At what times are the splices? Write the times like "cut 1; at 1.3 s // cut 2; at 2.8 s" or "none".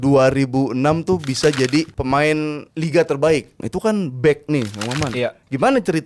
cut 1; at 2.2 s // cut 2; at 3.6 s